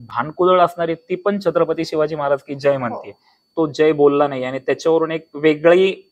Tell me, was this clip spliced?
yes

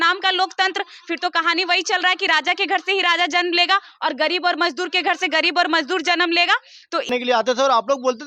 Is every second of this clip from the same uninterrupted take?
no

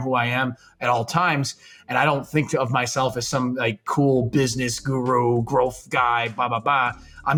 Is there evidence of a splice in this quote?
no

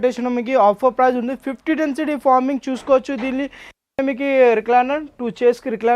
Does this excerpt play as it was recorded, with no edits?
no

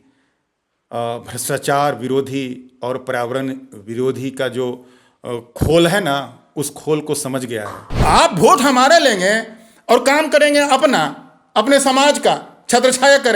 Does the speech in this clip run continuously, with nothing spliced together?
no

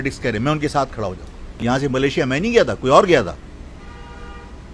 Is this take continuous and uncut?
no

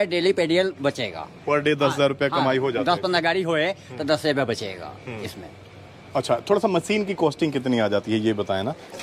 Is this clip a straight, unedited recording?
yes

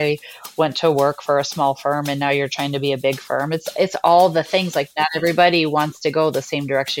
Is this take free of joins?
yes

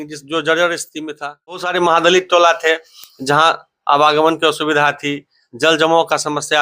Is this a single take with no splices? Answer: no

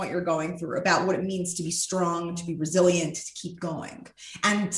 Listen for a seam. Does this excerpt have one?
no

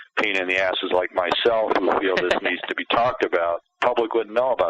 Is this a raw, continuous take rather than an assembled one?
no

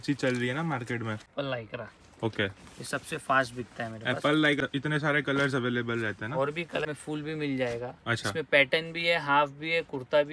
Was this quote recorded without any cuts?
no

